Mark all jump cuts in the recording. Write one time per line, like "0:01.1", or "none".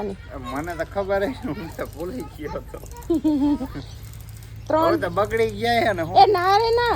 none